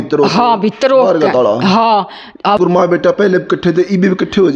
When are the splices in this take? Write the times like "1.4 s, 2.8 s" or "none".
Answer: 2.6 s

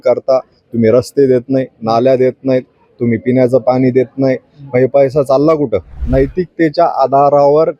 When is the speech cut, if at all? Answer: 6.0 s

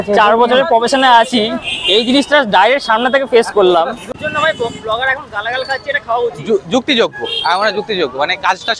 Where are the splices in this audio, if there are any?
4.2 s

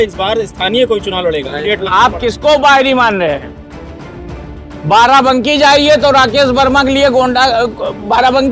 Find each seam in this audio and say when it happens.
1.6 s

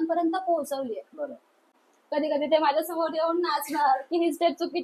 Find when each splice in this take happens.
1.8 s

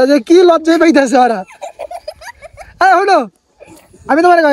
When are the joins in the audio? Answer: none

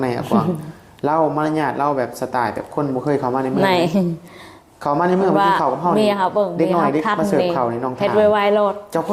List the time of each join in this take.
none

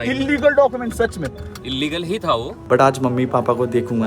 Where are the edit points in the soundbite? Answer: 2.6 s

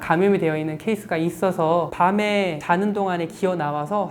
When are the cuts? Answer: 1.9 s

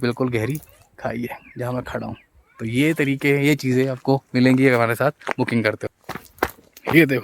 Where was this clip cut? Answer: 5.9 s

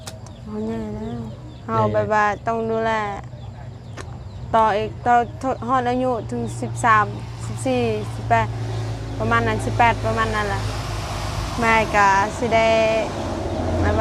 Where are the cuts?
none

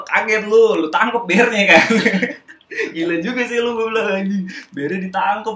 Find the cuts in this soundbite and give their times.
none

